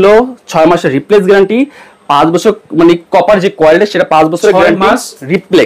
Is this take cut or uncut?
uncut